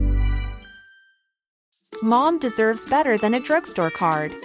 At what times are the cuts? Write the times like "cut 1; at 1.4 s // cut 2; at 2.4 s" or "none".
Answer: cut 1; at 1.5 s